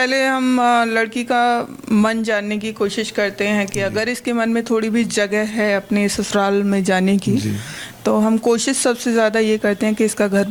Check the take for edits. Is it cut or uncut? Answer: uncut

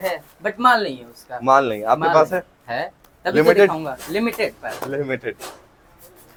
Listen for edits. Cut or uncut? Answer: uncut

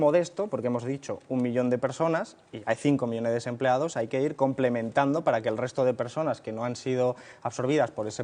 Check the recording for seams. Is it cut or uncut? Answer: cut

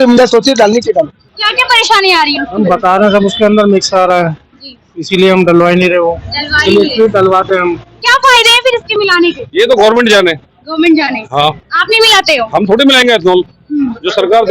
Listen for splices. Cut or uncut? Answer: cut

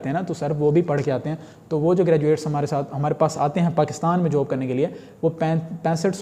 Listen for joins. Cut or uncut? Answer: uncut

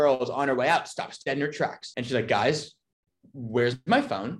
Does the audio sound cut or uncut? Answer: cut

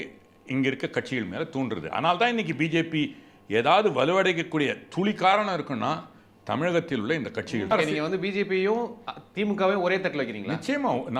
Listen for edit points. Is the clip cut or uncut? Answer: cut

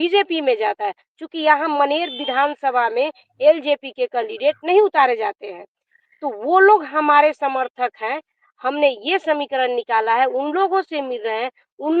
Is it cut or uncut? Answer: uncut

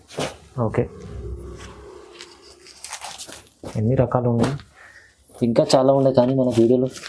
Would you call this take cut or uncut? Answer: uncut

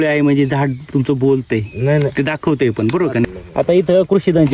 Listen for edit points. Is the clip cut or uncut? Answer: cut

